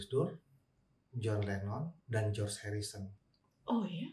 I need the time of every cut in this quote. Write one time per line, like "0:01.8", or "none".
0:03.2